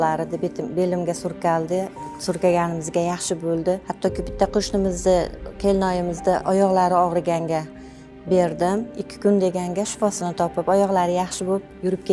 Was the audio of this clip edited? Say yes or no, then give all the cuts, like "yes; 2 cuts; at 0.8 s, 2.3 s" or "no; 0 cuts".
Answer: yes; 2 cuts; at 3.9 s, 8.9 s